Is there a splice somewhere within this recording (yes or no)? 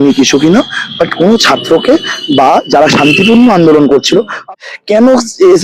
yes